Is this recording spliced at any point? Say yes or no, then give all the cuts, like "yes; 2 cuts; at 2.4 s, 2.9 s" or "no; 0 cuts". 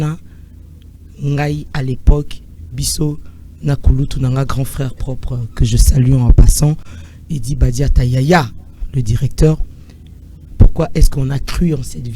no; 0 cuts